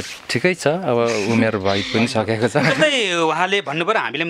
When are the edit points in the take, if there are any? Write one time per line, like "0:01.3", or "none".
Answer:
none